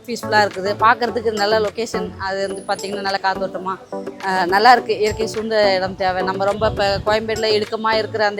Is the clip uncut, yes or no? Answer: yes